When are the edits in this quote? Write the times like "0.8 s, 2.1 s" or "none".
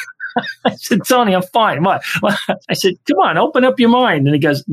2.7 s